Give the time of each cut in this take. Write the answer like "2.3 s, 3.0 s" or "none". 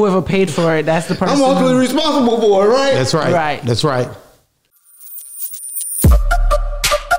4.8 s